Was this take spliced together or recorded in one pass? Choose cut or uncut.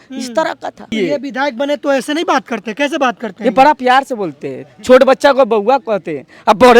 cut